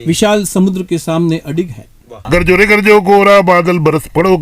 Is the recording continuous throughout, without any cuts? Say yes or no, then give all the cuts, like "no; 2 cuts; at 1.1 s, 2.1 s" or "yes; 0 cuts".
no; 1 cut; at 2.3 s